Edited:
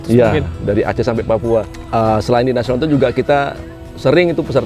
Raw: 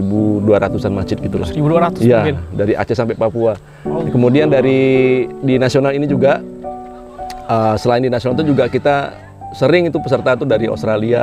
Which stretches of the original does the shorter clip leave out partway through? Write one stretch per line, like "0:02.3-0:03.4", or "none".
0:03.7-0:07.3